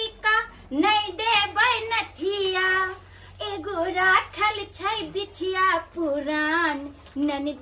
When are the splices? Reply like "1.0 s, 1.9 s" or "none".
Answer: none